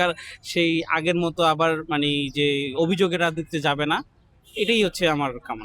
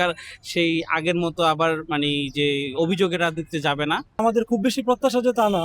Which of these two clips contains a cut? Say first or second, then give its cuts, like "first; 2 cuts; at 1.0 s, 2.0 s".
second; 1 cut; at 4.2 s